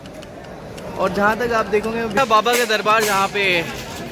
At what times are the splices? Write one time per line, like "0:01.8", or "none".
0:02.2